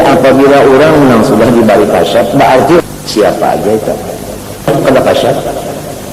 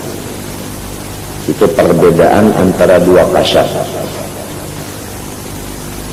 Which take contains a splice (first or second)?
first